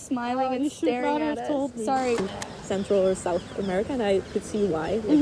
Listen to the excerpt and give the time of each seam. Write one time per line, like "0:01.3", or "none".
0:02.2